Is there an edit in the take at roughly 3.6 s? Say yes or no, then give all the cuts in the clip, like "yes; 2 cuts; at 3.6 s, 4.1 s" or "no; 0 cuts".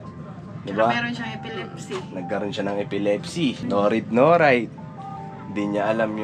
yes; 1 cut; at 3.6 s